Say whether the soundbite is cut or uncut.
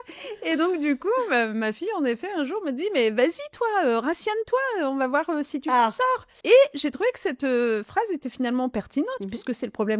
cut